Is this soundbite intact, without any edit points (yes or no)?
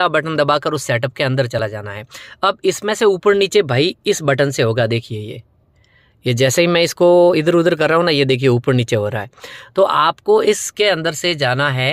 yes